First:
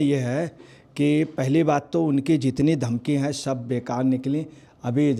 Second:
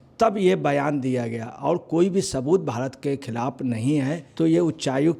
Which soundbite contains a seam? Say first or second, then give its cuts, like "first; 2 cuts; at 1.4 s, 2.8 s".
second; 1 cut; at 4.2 s